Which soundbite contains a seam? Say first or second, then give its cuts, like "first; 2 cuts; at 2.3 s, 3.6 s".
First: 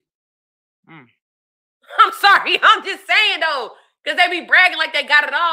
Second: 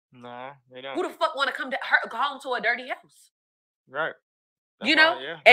second; 1 cut; at 4.4 s